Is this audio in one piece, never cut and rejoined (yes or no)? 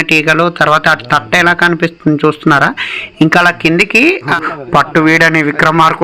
no